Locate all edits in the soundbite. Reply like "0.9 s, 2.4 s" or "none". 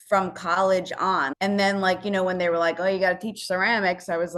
1.3 s

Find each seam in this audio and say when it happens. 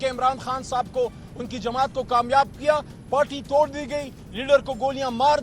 3.0 s

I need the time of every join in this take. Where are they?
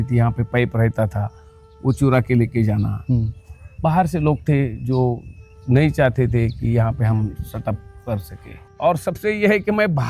8.6 s

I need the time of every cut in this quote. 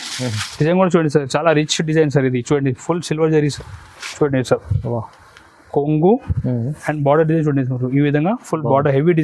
3.5 s

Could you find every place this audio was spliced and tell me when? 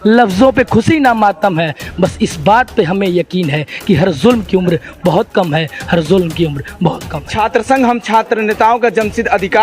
7.3 s

